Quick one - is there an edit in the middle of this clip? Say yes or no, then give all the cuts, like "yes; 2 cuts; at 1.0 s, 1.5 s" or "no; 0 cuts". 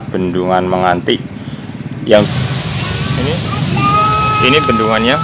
yes; 1 cut; at 2.3 s